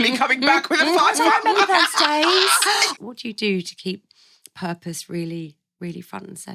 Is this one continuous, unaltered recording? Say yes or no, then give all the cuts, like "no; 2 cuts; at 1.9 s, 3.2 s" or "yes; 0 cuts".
no; 1 cut; at 2.9 s